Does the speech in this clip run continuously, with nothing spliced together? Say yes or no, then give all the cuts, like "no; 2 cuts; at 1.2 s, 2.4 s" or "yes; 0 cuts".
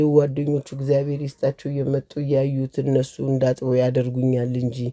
yes; 0 cuts